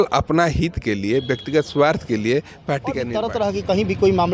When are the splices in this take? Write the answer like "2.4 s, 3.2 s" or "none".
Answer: 3.1 s